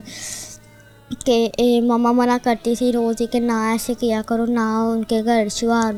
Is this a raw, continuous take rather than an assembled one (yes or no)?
yes